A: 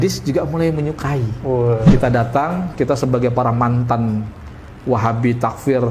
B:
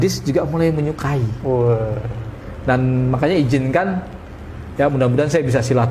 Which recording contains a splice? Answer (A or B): A